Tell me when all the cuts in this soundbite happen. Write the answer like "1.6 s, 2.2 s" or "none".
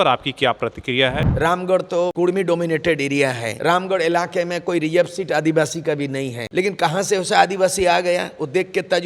1.2 s, 2.1 s, 3.5 s, 6.4 s